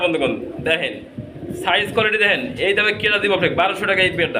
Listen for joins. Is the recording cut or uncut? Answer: uncut